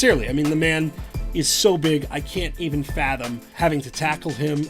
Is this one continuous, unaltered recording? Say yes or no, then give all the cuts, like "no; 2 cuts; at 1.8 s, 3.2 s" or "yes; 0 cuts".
no; 1 cut; at 3.5 s